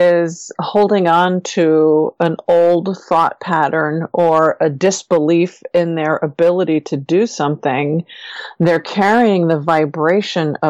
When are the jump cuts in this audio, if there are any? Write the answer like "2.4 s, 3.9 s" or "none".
none